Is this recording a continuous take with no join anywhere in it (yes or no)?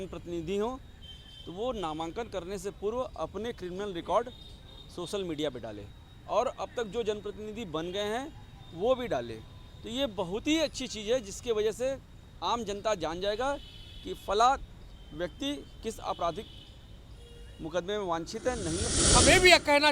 no